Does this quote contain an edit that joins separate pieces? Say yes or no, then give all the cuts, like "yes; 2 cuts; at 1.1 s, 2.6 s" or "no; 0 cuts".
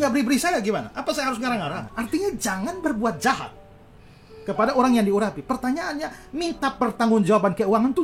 yes; 1 cut; at 1.8 s